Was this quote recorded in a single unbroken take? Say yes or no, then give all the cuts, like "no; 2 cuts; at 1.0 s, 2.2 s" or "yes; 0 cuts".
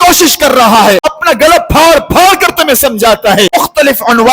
no; 2 cuts; at 1.1 s, 3.5 s